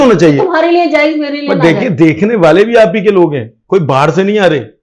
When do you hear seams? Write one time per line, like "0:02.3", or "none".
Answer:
none